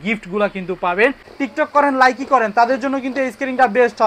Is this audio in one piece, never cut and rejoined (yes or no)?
no